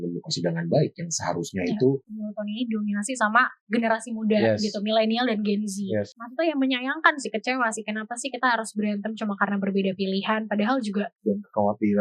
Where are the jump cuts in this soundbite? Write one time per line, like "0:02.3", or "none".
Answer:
0:02.1
0:06.2
0:11.1